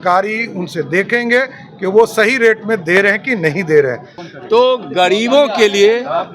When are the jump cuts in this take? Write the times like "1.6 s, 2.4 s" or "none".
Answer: 4.2 s